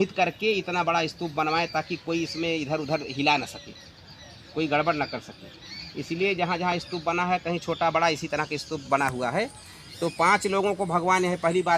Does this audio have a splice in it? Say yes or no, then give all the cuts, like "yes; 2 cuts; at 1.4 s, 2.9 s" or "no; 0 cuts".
no; 0 cuts